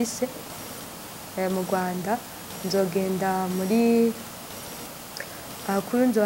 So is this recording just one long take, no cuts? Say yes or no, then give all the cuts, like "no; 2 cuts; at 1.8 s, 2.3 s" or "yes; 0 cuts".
yes; 0 cuts